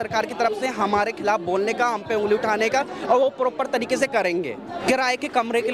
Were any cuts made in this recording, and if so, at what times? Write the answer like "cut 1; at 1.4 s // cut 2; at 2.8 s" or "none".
cut 1; at 4.6 s